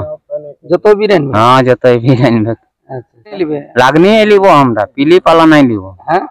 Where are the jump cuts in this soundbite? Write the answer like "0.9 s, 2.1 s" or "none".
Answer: 3.5 s